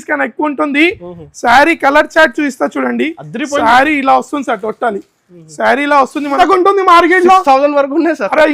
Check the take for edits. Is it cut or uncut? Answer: cut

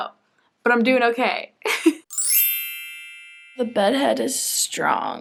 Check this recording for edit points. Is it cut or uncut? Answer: uncut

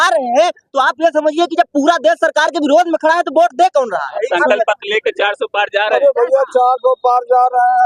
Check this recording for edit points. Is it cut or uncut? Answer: uncut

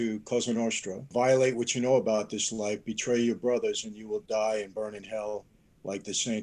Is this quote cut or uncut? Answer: cut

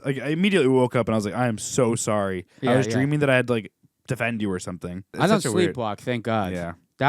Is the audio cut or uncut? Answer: cut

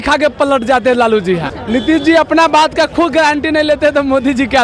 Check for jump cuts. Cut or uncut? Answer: cut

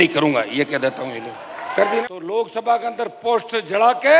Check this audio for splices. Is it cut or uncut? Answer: cut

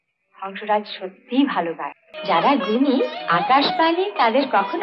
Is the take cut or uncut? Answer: cut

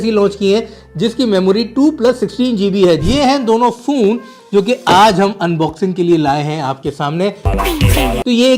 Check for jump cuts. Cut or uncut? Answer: cut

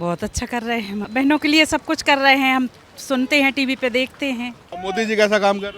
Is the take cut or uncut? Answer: cut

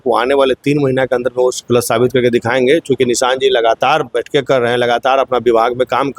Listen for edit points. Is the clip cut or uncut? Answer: uncut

